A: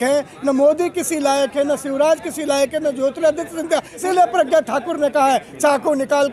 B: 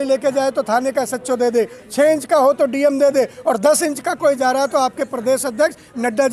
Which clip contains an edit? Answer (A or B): A